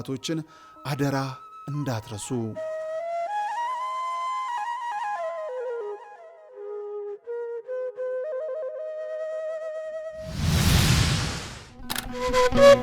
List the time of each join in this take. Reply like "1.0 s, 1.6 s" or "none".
10.2 s